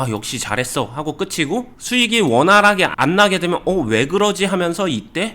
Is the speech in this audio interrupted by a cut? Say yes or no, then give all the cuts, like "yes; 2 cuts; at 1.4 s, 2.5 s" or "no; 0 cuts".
yes; 1 cut; at 1.8 s